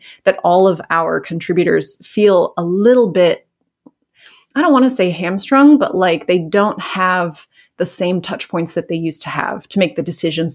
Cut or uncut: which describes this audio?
uncut